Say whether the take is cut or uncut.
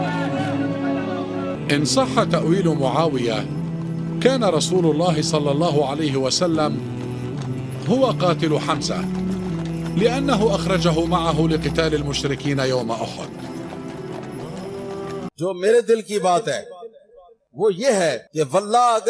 cut